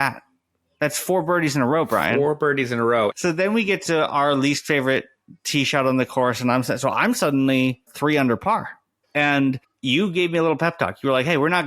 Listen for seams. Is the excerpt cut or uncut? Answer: cut